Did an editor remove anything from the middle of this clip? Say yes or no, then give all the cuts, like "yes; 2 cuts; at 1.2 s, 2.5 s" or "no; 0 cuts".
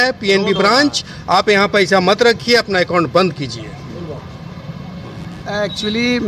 no; 0 cuts